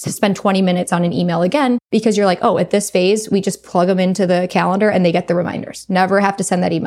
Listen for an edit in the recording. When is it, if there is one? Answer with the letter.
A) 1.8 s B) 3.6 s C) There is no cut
A